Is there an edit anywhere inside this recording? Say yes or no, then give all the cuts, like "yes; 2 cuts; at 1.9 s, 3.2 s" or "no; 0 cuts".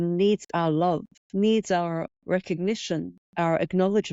yes; 3 cuts; at 1.2 s, 2.1 s, 3.2 s